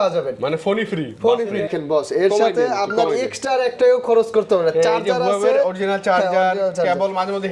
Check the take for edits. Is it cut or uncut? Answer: cut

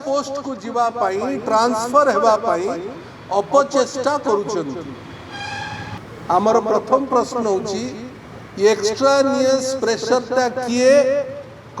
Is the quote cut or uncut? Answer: cut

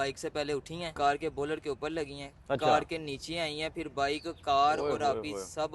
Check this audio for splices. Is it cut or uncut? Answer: cut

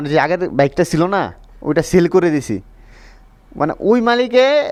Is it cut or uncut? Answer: uncut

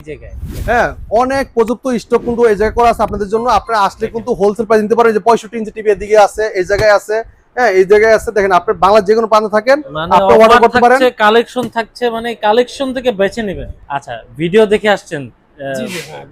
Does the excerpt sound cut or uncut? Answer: cut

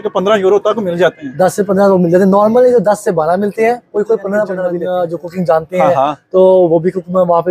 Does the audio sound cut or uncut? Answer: cut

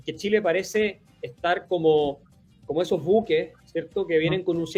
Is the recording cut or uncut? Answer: uncut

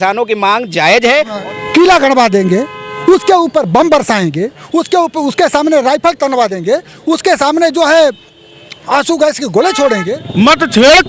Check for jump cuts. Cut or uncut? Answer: cut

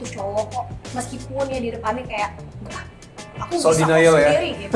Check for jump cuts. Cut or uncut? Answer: uncut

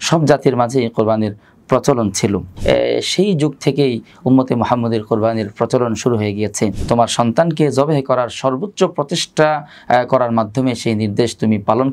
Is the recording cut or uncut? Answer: cut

